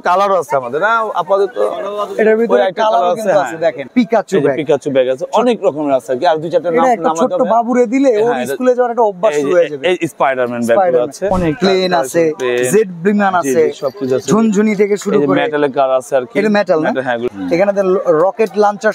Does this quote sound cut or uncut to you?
cut